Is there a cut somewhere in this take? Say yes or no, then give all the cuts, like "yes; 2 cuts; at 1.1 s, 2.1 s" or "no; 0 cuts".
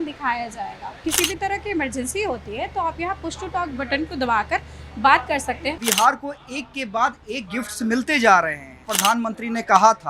yes; 3 cuts; at 1.0 s, 5.8 s, 8.9 s